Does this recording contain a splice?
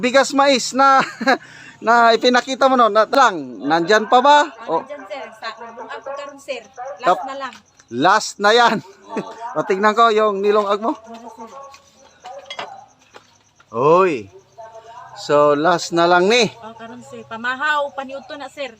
yes; 1 cut; at 3.1 s

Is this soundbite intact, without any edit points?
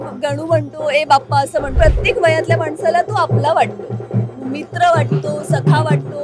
no; 1 cut; at 1.7 s

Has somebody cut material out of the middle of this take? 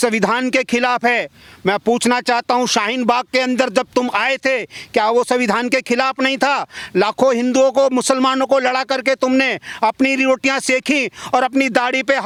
no; 0 cuts

